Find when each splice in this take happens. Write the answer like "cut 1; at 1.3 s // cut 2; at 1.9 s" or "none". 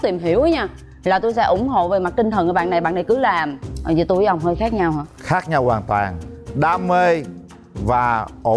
none